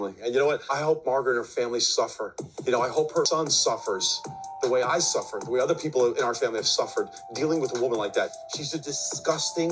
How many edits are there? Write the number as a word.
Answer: one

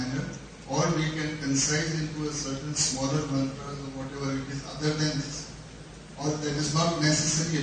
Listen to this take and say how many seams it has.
one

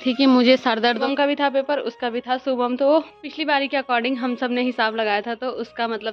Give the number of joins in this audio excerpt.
two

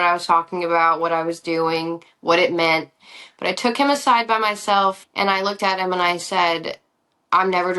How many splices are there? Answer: one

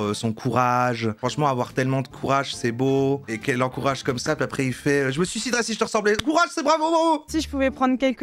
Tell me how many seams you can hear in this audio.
three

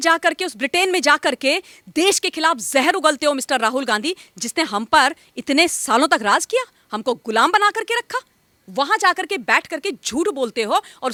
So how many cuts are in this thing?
zero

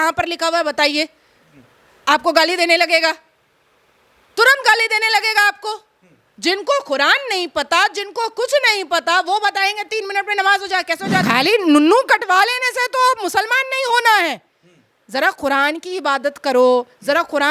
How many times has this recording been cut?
one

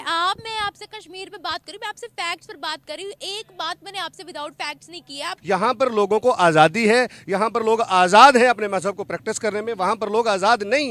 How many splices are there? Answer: one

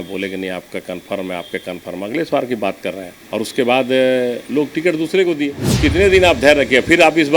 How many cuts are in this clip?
two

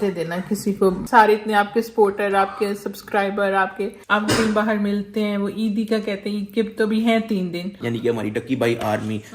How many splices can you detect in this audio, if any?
three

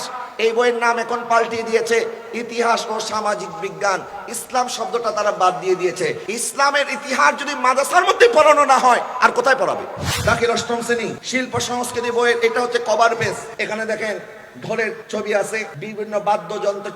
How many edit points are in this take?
six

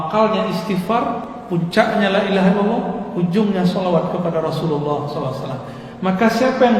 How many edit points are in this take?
one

